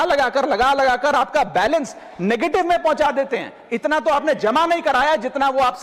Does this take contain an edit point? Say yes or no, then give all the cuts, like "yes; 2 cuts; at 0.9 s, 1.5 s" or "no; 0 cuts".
no; 0 cuts